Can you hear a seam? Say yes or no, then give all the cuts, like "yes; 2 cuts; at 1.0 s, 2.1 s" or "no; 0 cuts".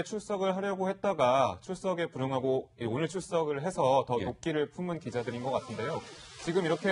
yes; 1 cut; at 4.9 s